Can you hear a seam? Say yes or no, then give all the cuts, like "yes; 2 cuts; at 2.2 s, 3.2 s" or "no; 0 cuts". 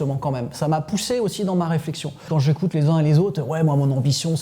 yes; 1 cut; at 2.3 s